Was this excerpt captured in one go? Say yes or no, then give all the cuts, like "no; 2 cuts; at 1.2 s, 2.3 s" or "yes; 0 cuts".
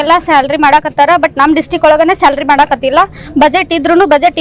yes; 0 cuts